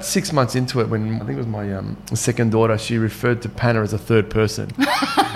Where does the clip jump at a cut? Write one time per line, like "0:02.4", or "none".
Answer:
0:01.2